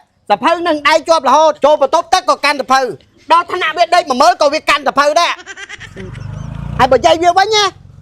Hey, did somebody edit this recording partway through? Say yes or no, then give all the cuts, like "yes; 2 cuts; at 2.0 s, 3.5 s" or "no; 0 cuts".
yes; 2 cuts; at 1.6 s, 5.6 s